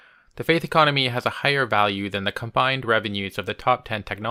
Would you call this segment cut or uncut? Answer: uncut